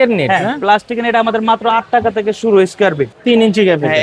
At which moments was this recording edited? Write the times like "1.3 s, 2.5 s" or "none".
3.1 s